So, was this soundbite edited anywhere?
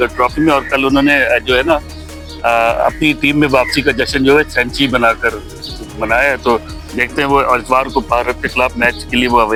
no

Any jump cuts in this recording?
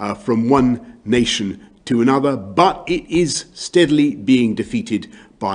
yes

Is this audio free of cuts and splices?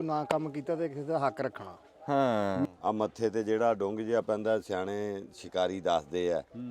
no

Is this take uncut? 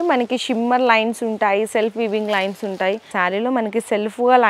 no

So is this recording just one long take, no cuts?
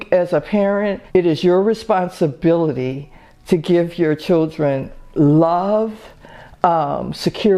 no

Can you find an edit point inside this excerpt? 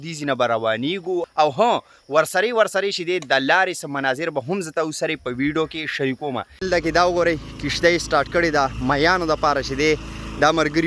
yes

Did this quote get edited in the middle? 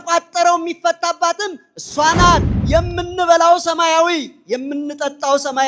yes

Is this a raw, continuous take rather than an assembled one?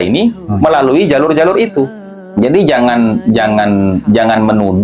no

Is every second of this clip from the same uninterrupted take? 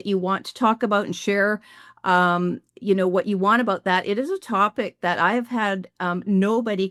yes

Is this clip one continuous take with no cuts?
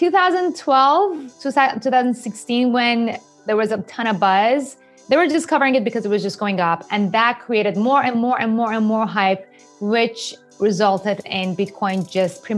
yes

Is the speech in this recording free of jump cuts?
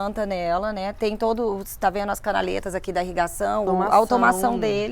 no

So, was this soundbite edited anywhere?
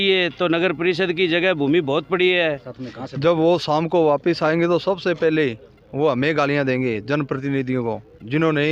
yes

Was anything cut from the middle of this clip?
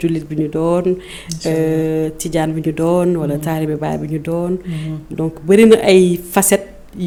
no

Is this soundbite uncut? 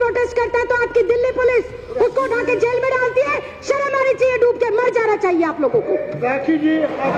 yes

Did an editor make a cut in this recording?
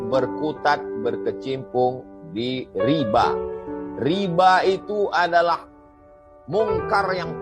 no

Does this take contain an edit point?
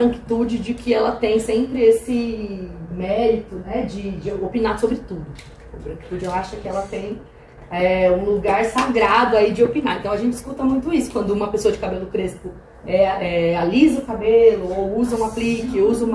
no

